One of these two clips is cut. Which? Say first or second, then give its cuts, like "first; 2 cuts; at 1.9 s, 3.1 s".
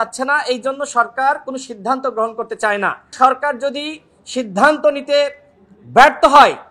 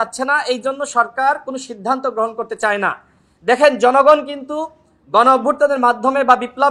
first; 1 cut; at 3.1 s